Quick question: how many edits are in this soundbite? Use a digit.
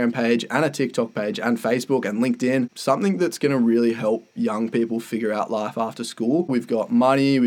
2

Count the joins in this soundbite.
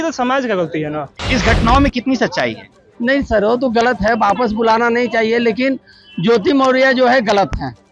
1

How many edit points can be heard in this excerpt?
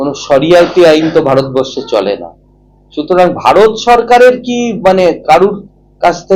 0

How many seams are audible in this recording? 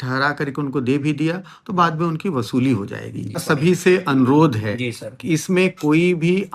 1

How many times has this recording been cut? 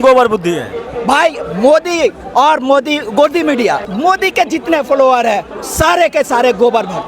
1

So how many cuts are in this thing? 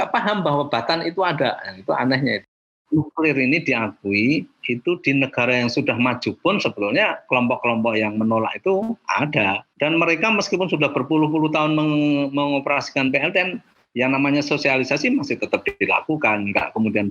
2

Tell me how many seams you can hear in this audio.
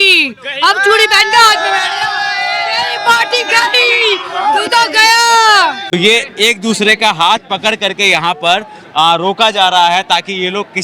1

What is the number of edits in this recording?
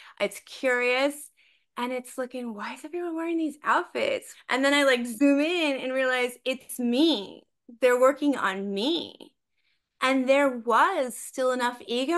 1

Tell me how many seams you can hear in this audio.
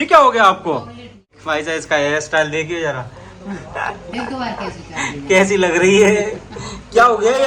1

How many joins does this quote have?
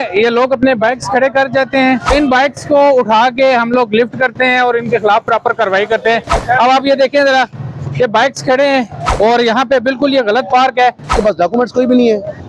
2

